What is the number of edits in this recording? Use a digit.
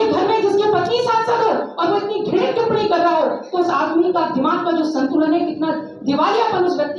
0